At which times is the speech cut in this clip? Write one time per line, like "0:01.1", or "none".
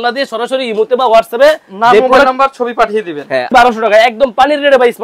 0:03.5